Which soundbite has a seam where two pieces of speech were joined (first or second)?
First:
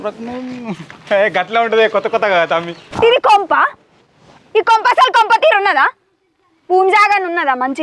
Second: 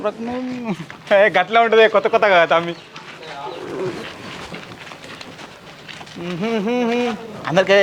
first